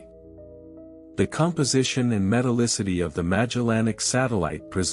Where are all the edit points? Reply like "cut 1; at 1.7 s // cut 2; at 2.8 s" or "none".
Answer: cut 1; at 2.8 s // cut 2; at 4.0 s